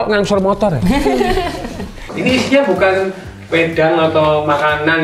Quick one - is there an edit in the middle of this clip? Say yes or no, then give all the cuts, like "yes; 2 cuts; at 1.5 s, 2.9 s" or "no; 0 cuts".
yes; 1 cut; at 2.1 s